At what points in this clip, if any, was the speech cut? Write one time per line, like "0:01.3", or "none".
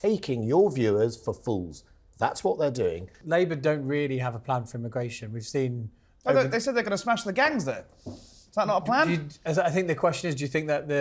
0:03.1

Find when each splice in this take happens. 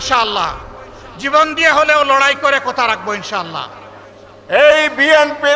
0:04.2

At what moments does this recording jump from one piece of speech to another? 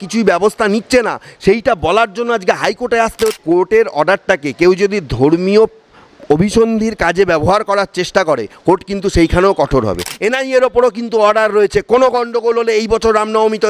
0:03.4
0:10.1

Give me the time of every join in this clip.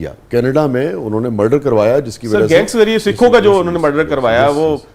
none

